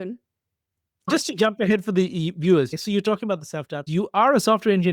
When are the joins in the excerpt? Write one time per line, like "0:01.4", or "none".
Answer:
0:01.1
0:02.7
0:03.9